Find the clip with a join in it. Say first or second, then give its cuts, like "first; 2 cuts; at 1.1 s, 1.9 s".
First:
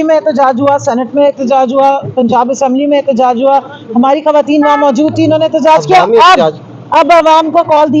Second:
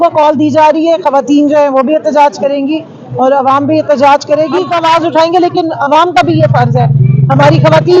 second; 1 cut; at 4.7 s